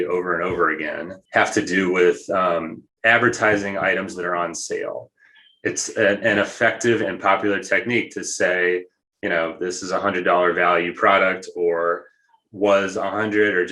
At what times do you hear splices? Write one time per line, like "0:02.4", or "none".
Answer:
0:01.1
0:02.8